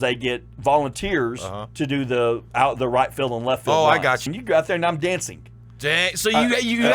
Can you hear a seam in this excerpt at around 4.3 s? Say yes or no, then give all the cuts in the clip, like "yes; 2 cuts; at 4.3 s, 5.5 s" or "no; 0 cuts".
yes; 1 cut; at 4.3 s